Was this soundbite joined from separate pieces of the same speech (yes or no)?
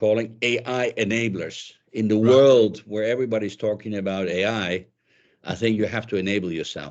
no